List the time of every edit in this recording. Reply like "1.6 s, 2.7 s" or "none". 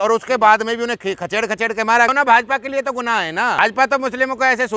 2.1 s, 3.6 s